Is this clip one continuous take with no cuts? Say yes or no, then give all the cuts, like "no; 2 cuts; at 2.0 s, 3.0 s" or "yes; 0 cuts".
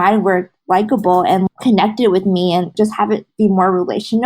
no; 2 cuts; at 1.5 s, 2.7 s